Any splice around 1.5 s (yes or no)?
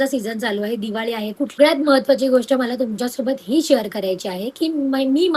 yes